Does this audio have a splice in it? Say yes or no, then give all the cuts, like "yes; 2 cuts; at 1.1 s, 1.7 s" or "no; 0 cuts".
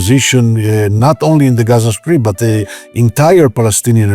no; 0 cuts